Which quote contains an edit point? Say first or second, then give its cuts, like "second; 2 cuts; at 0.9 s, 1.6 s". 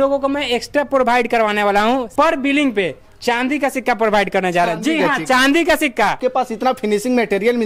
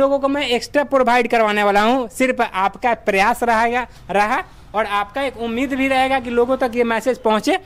first; 2 cuts; at 2.1 s, 6.2 s